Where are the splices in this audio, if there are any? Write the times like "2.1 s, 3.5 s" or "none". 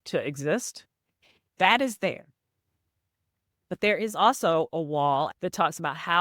5.3 s